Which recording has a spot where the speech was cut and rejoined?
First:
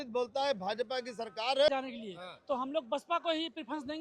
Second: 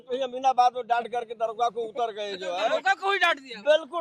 first; 1 cut; at 1.7 s

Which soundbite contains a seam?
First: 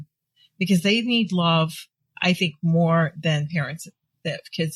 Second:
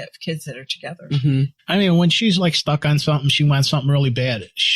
second; 1 cut; at 1.6 s

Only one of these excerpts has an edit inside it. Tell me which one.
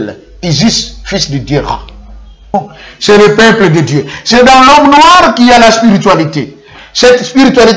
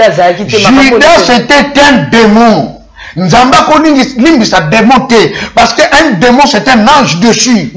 first; 1 cut; at 2.5 s

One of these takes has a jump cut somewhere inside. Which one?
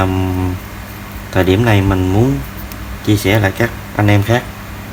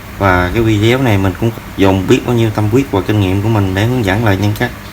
second; 1 cut; at 1.5 s

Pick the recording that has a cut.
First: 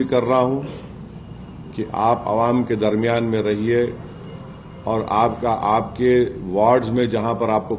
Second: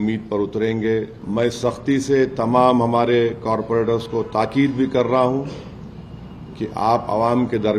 second; 1 cut; at 1.2 s

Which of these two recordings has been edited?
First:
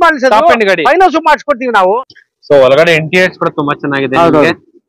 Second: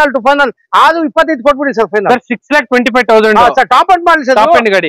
first; 1 cut; at 2.0 s

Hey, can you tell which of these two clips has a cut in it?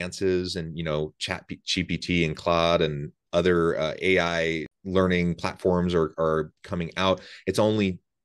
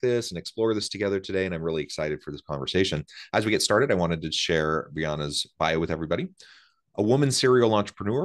first; 1 cut; at 4.7 s

